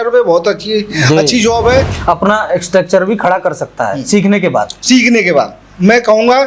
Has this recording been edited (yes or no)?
yes